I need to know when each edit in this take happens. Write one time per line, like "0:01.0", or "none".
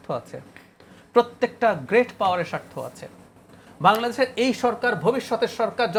none